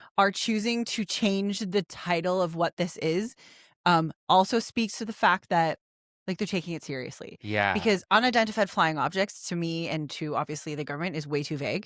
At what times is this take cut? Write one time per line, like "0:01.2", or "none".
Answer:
none